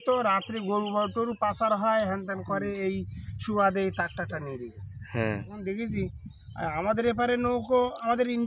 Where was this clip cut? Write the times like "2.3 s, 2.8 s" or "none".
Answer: 5.5 s